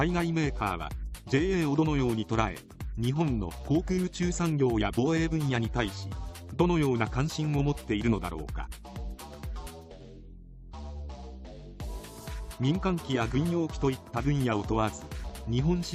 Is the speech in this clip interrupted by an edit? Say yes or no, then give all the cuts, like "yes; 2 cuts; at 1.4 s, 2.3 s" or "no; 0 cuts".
no; 0 cuts